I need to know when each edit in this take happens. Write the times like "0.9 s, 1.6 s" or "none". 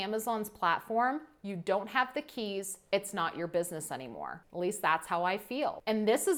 none